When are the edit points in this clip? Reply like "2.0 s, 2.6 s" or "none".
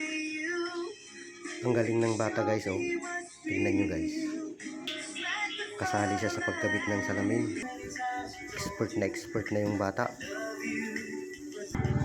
7.6 s